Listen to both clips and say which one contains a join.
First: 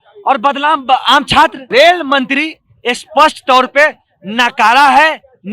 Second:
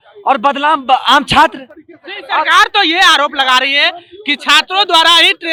first; 1 cut; at 1.6 s

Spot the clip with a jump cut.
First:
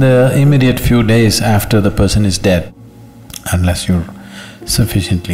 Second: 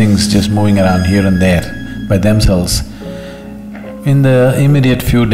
first; 1 cut; at 2.7 s

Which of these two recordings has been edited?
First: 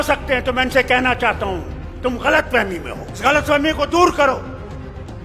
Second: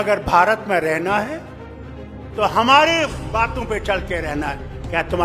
first; 1 cut; at 3.2 s

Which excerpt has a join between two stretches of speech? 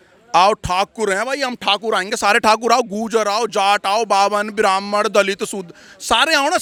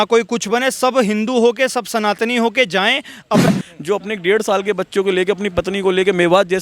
second; 1 cut; at 3.5 s

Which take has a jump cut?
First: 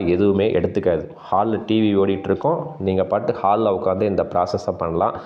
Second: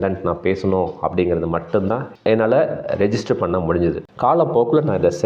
second; 1 cut; at 2.1 s

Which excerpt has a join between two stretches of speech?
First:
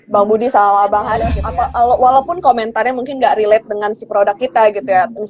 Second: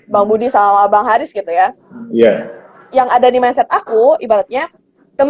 first; 1 cut; at 1.4 s

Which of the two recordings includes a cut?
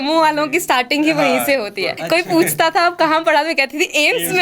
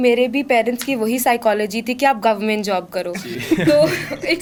first; 1 cut; at 1.9 s

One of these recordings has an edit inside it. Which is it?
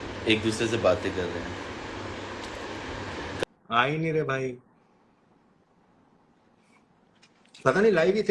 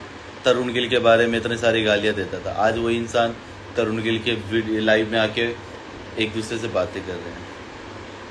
first; 1 cut; at 3.4 s

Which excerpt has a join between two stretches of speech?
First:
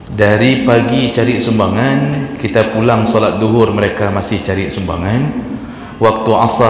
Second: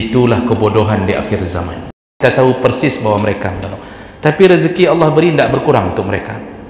second; 1 cut; at 2.2 s

